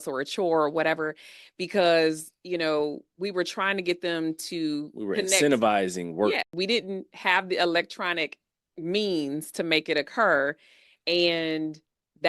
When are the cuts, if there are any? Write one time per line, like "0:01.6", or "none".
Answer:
0:06.6

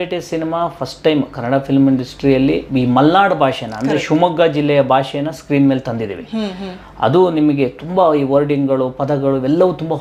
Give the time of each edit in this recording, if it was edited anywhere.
none

